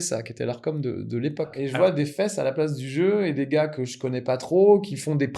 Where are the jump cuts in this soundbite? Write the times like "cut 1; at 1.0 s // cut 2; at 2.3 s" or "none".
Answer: cut 1; at 1.6 s